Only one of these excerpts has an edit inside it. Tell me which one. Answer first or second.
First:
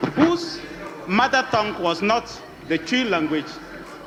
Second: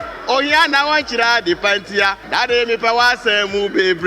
second